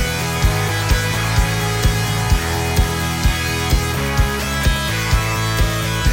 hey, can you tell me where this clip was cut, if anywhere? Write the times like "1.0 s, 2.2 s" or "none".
none